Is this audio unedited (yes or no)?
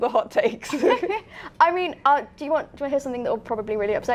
yes